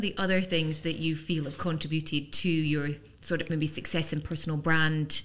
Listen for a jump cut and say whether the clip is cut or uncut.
uncut